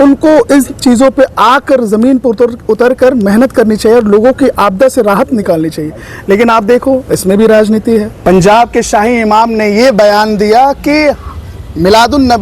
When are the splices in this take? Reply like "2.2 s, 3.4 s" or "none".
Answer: 8.1 s